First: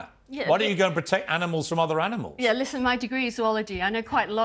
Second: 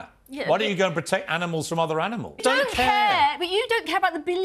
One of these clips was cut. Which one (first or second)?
second